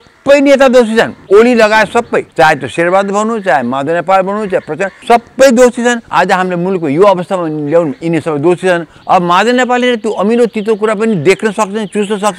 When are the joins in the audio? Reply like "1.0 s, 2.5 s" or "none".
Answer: 1.2 s, 2.3 s, 4.9 s, 6.0 s, 8.9 s